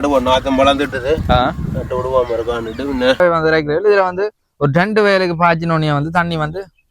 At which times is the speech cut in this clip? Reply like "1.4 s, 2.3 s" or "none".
3.2 s